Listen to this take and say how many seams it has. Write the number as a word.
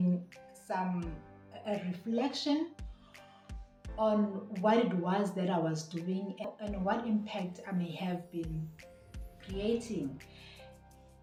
zero